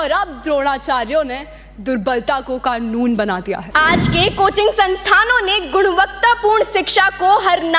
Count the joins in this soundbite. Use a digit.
1